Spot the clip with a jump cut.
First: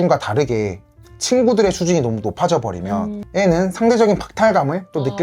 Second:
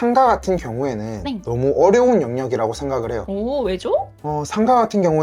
first; 1 cut; at 3.2 s

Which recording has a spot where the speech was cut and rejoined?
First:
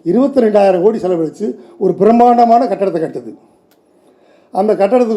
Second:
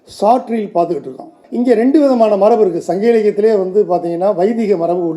second; 1 cut; at 1.4 s

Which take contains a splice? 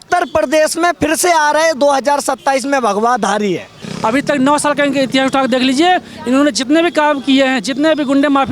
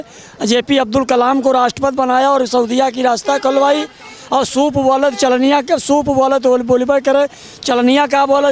first; 1 cut; at 3.9 s

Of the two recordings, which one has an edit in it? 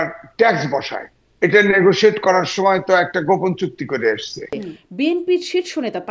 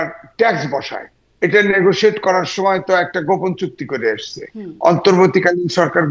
first; 1 cut; at 4.6 s

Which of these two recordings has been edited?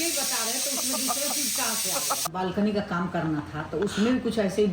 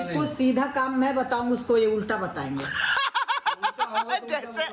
first; 1 cut; at 2.3 s

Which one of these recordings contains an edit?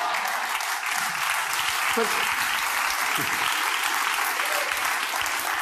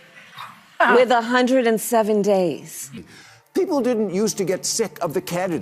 second; 1 cut; at 3.0 s

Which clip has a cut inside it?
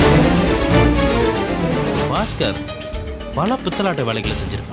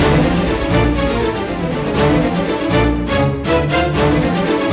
first; 1 cut; at 2.0 s

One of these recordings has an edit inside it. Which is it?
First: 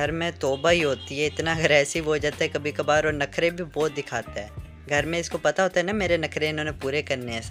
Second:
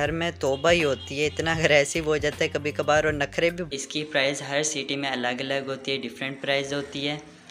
second; 1 cut; at 3.7 s

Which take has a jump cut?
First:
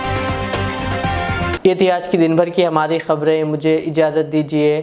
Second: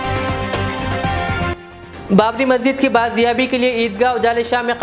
second; 1 cut; at 1.5 s

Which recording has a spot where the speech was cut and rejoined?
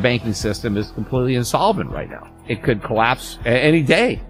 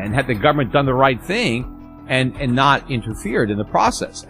first; 1 cut; at 2.4 s

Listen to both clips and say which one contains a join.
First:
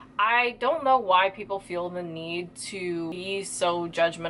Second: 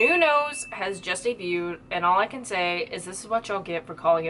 first; 1 cut; at 3.1 s

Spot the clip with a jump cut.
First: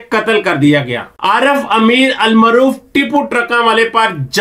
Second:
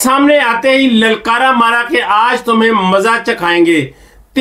first; 1 cut; at 1.1 s

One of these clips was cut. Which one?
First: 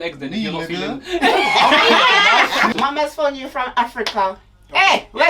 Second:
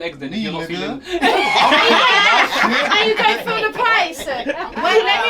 first; 1 cut; at 2.7 s

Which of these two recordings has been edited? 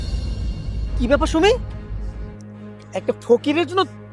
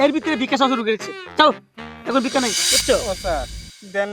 second; 1 cut; at 2.7 s

